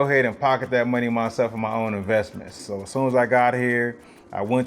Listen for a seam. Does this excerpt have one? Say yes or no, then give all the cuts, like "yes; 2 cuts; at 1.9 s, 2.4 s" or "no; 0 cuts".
yes; 1 cut; at 2.6 s